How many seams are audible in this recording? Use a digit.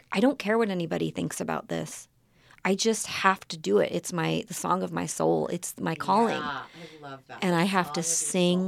0